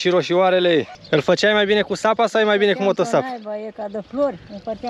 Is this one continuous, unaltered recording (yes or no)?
no